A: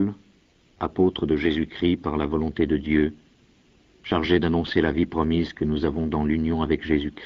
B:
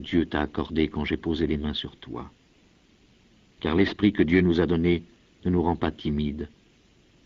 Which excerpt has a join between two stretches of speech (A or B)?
B